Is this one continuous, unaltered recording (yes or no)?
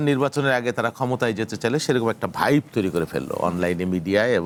yes